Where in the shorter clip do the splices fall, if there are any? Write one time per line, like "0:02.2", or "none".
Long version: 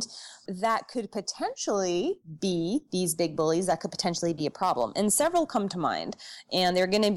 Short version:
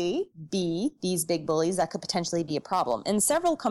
none

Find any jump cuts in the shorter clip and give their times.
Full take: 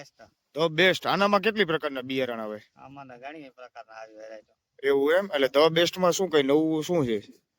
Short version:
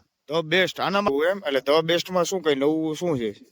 0:01.1

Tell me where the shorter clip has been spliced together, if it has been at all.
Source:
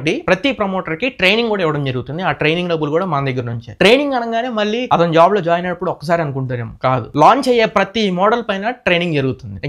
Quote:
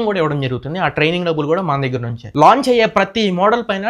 0:02.3

